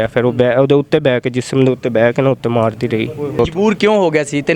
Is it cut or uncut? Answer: cut